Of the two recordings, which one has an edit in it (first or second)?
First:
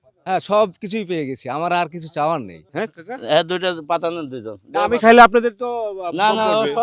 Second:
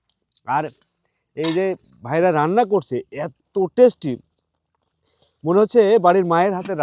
first